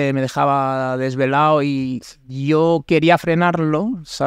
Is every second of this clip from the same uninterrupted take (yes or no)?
yes